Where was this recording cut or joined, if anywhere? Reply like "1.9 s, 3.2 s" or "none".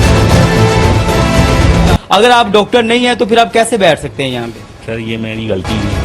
1.9 s